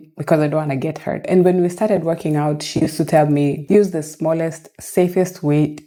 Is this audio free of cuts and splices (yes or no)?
yes